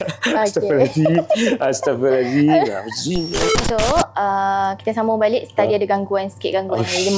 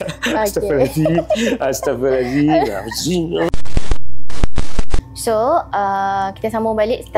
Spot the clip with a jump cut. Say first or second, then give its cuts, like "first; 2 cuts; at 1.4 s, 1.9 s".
first; 1 cut; at 3.5 s